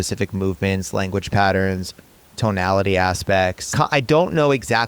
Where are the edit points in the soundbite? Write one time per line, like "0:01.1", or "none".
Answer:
0:03.6